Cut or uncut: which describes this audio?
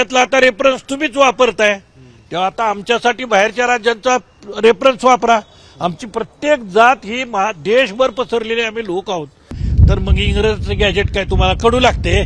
cut